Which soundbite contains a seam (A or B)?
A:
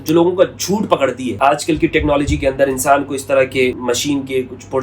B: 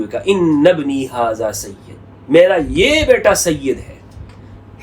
A